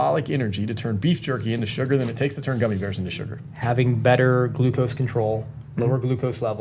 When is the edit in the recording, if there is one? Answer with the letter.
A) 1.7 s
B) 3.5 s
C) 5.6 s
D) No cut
B